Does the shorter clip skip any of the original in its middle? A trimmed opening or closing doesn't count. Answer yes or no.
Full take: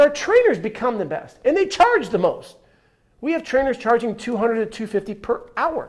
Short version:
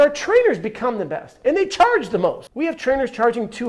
yes